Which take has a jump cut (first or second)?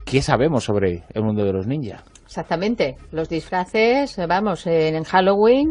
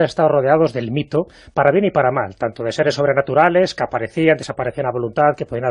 first